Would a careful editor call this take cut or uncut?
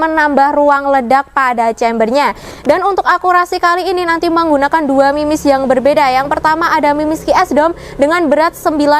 cut